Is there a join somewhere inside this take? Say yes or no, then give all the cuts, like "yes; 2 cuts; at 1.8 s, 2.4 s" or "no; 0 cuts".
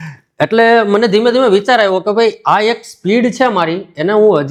no; 0 cuts